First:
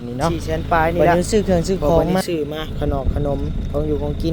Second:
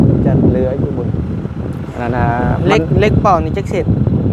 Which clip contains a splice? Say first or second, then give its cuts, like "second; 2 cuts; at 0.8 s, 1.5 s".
first; 1 cut; at 2.2 s